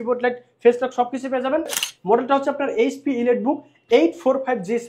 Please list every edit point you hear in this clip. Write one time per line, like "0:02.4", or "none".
0:01.8